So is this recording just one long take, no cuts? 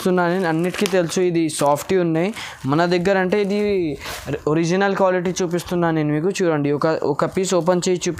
yes; 0 cuts

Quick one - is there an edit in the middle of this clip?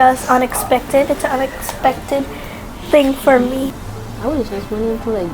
yes; 1 cut; at 3.8 s

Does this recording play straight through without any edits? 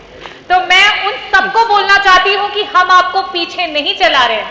yes; 0 cuts

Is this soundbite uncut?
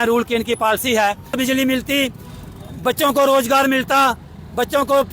no; 1 cut; at 1.3 s

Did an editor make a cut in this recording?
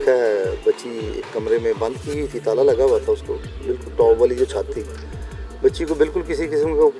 no; 0 cuts

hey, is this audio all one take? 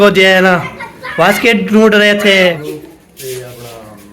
no; 1 cut; at 2.6 s

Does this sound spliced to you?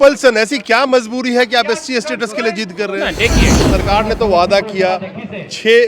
yes; 1 cut; at 3.6 s

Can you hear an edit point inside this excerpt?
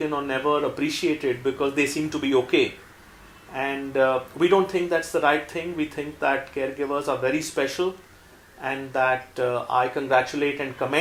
no; 0 cuts

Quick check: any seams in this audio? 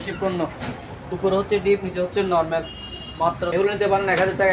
yes; 1 cut; at 3.5 s

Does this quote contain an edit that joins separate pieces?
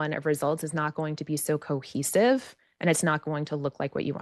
no; 0 cuts

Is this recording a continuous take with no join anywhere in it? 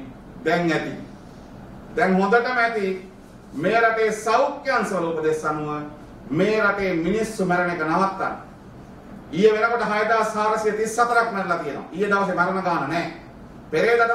yes; 0 cuts

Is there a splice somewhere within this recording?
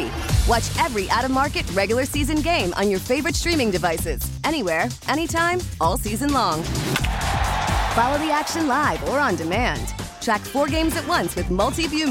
no; 0 cuts

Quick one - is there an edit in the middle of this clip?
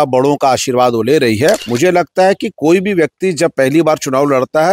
yes; 1 cut; at 1.7 s

